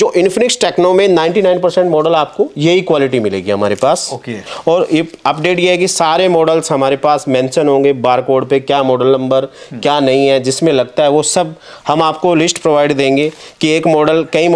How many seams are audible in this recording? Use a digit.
0